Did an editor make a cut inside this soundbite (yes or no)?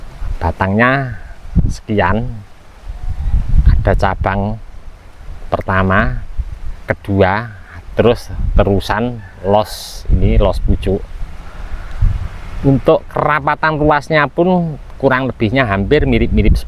no